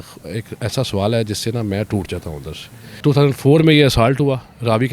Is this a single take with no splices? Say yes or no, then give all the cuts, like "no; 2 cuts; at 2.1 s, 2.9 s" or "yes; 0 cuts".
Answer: no; 1 cut; at 3.0 s